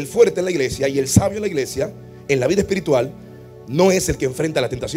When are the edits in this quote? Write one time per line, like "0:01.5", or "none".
none